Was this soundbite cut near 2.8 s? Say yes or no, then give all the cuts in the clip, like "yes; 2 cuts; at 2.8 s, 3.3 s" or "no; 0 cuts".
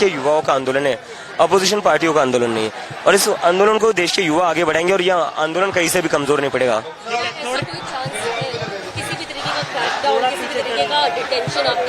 no; 0 cuts